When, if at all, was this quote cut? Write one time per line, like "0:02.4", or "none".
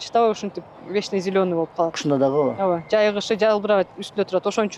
none